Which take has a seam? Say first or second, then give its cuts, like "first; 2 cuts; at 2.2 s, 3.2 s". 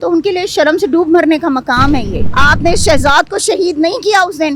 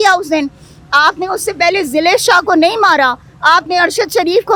first; 1 cut; at 2.2 s